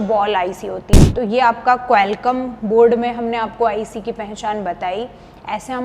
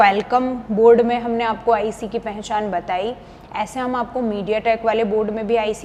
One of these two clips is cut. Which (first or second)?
first